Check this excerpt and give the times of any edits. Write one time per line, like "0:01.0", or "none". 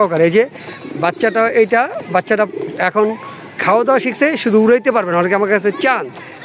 none

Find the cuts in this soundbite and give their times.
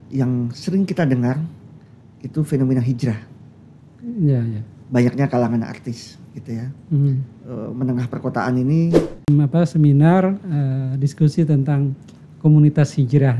0:09.3

